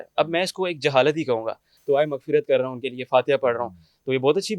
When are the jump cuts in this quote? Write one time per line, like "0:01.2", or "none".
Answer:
0:01.8